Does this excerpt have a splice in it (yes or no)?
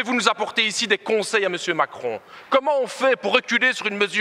no